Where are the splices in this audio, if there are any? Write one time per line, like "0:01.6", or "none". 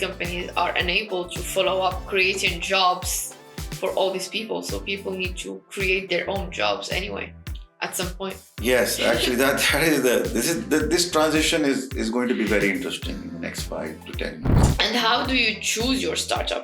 0:14.5

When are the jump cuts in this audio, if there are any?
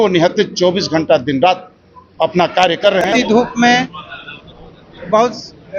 0:03.0

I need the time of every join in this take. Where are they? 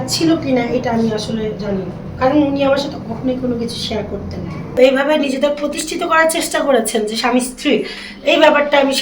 0:04.8

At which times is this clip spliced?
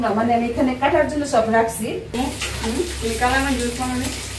0:02.1

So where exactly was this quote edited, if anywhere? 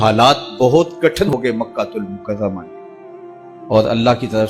0:01.3

